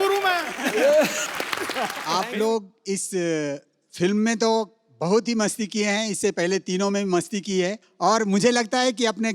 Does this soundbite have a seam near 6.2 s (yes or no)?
no